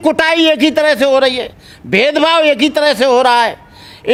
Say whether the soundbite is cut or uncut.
uncut